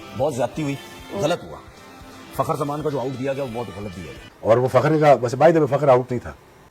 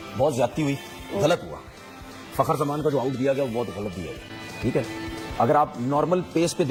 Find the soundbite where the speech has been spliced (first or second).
first